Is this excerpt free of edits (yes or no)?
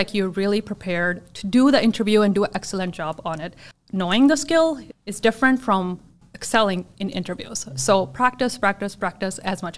no